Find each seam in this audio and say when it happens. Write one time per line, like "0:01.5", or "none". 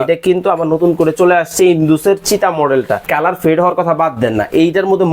0:03.0